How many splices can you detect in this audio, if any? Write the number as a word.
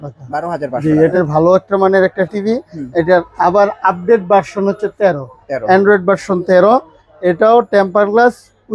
one